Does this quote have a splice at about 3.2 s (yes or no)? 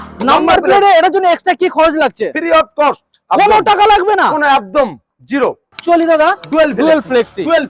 no